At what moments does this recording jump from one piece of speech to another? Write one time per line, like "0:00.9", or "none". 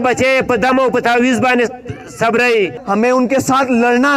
0:02.8

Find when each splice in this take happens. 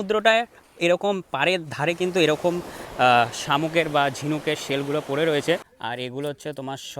0:05.8

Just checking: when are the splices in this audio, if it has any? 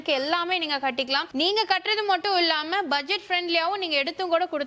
none

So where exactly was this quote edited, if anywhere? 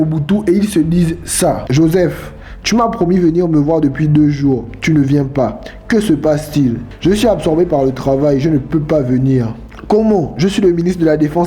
0:01.6

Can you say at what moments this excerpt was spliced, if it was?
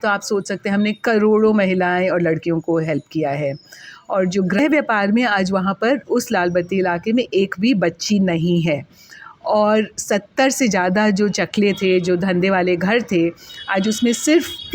0:04.6

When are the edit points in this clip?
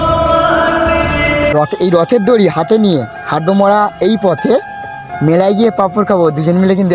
0:01.5

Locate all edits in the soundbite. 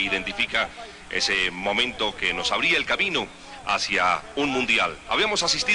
0:03.9

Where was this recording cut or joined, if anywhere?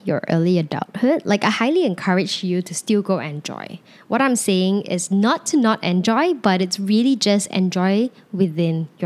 none

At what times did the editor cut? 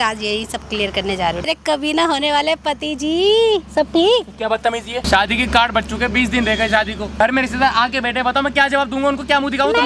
0:01.4
0:05.1
0:07.1

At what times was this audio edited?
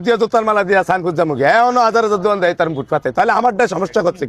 none

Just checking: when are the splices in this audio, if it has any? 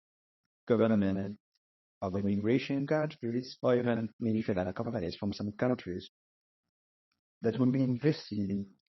0:03.5
0:04.1

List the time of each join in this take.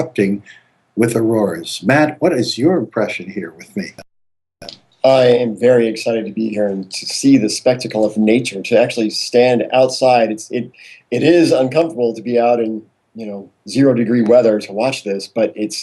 0:01.7

